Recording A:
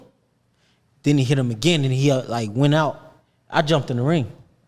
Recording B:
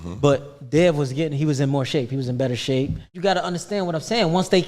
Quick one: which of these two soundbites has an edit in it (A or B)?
B